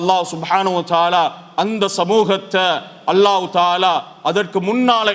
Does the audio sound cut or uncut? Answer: uncut